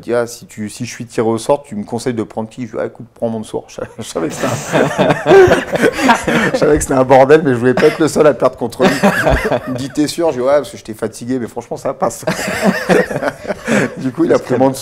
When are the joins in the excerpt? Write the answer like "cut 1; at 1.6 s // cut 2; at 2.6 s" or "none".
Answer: none